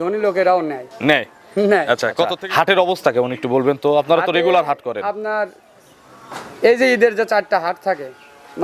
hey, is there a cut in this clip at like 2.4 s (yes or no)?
yes